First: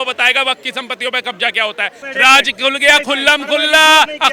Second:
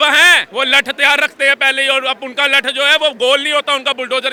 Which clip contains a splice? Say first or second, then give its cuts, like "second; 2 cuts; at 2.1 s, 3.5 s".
first; 1 cut; at 2.0 s